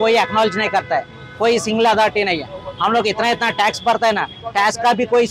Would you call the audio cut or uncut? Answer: uncut